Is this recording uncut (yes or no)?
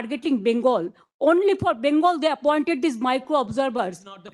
yes